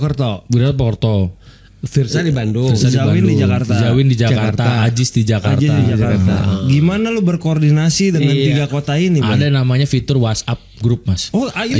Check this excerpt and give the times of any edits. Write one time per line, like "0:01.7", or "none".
none